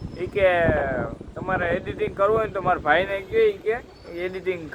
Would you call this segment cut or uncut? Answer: uncut